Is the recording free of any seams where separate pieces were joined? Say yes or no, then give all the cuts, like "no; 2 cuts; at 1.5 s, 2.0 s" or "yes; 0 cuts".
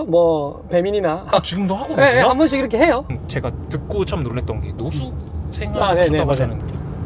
yes; 0 cuts